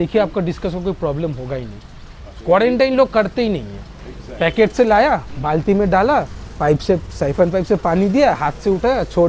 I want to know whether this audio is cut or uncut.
uncut